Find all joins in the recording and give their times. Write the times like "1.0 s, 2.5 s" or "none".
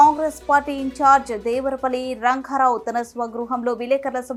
none